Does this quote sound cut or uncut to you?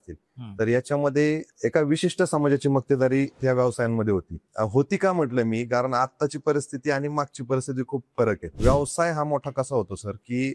cut